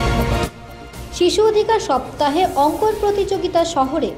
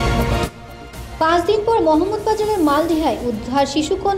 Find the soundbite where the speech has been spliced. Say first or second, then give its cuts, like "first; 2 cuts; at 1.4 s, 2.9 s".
second; 1 cut; at 0.9 s